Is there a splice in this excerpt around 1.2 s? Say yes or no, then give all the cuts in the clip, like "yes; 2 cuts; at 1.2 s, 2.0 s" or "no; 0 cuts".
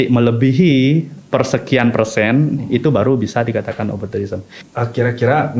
no; 1 cut; at 4.6 s